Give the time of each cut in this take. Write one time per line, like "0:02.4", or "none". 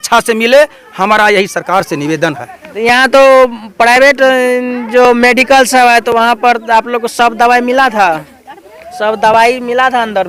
none